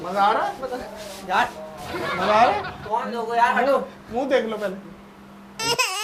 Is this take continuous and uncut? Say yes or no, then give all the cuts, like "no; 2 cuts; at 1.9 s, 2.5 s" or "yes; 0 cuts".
yes; 0 cuts